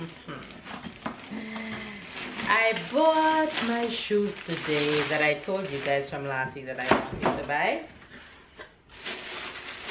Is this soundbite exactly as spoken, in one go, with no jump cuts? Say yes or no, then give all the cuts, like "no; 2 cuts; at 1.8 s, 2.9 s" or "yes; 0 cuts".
yes; 0 cuts